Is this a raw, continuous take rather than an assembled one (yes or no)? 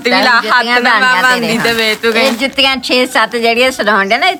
yes